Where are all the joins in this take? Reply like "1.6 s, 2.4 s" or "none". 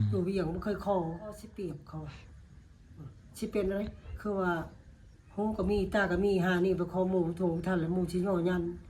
1.5 s